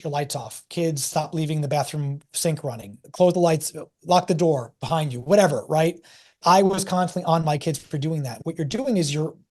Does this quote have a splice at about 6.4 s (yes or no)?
no